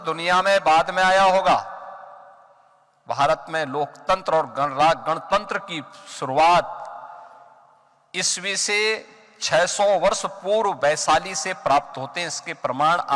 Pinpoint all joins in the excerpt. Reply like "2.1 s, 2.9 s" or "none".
none